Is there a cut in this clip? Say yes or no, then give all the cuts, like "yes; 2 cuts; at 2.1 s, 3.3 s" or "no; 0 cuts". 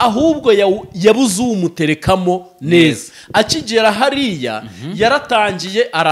no; 0 cuts